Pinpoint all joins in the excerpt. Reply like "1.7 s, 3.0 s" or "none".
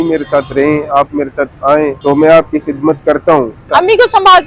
2.0 s, 3.7 s